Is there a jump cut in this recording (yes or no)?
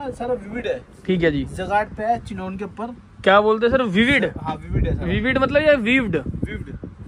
no